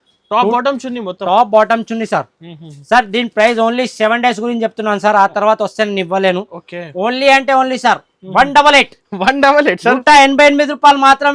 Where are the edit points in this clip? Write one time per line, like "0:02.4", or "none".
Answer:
none